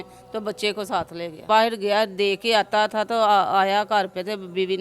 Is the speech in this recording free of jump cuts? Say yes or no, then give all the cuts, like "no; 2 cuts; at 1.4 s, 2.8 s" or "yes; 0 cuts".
no; 1 cut; at 1.4 s